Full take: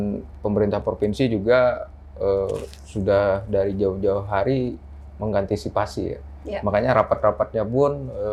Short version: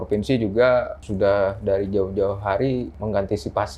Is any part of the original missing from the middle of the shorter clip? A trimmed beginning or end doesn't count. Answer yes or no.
yes